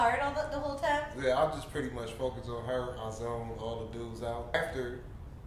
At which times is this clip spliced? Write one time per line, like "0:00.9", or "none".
0:04.5